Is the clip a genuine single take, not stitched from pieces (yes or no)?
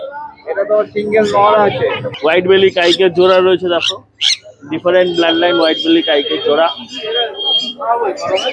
no